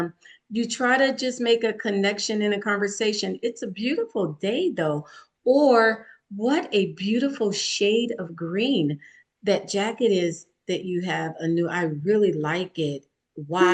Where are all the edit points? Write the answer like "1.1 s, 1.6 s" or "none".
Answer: none